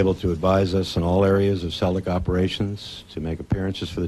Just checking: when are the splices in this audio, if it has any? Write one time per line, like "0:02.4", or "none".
0:01.1